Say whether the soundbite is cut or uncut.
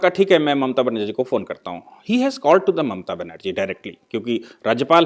uncut